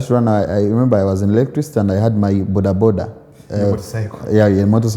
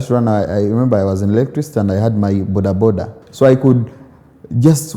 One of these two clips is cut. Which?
second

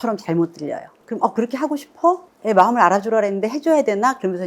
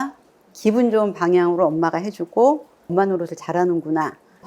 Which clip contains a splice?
first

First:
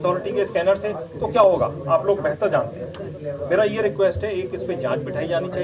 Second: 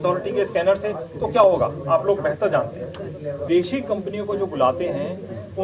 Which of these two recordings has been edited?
second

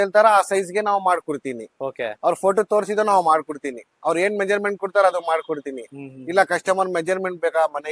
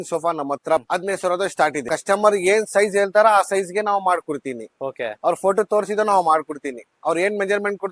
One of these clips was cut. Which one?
second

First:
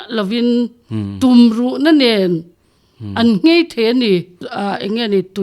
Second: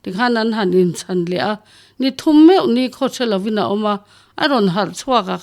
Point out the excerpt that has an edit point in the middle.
first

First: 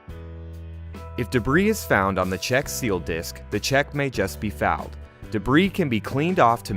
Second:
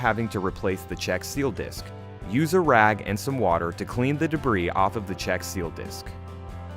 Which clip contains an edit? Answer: second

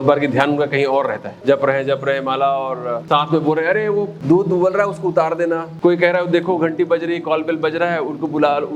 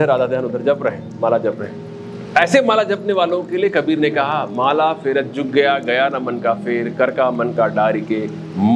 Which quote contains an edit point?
first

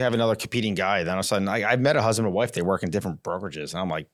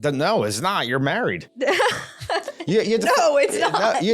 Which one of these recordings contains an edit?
second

